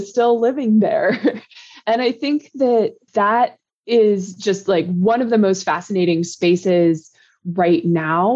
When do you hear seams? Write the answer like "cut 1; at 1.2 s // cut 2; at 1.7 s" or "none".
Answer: none